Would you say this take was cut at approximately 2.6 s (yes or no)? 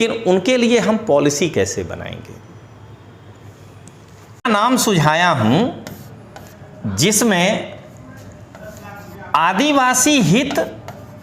no